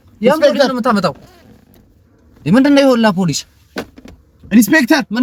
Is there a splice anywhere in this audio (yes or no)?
no